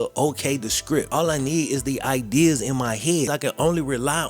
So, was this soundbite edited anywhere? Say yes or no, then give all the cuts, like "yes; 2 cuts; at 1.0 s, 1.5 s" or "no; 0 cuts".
yes; 2 cuts; at 1.1 s, 3.3 s